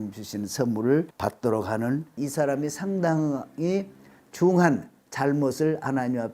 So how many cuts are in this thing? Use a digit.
2